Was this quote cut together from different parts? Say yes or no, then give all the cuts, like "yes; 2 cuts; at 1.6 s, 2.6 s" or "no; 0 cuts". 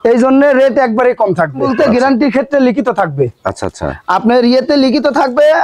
yes; 1 cut; at 1.7 s